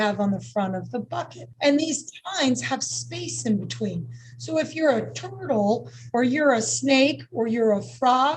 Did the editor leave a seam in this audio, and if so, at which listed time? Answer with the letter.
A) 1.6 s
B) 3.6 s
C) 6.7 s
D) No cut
A